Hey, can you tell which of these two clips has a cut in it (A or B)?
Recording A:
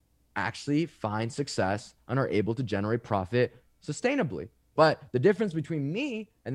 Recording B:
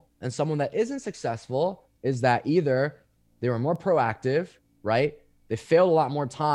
A